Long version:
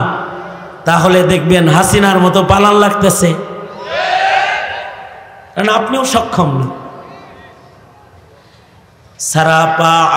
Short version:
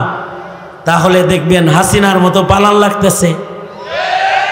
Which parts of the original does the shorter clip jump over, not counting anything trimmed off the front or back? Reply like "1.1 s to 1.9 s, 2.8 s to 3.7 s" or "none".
none